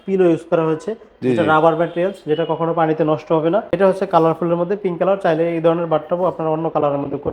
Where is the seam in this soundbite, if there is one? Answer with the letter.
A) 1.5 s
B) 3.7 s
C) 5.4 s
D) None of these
B